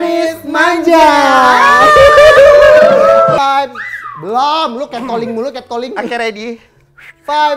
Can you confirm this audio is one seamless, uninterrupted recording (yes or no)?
no